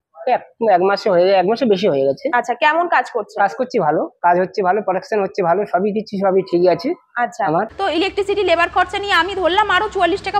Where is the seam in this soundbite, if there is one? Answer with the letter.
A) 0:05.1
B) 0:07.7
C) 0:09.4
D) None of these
B